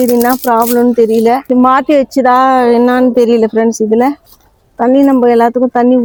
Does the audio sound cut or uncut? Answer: uncut